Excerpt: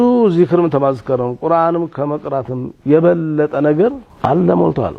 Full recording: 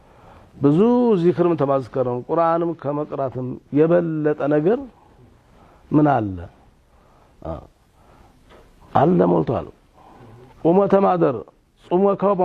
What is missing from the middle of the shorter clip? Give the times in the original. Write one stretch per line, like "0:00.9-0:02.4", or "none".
0:04.9-0:08.8